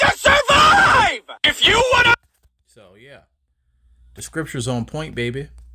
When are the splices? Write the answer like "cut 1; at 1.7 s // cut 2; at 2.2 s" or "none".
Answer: none